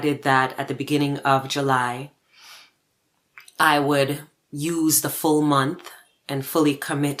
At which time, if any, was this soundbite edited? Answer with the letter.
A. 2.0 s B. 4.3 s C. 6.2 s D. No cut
D